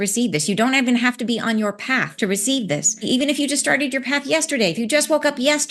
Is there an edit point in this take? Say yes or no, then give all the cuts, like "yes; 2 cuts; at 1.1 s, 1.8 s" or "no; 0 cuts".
yes; 2 cuts; at 2.1 s, 3.1 s